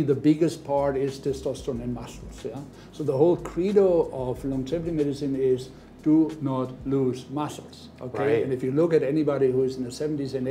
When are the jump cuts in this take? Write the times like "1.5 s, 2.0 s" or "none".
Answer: none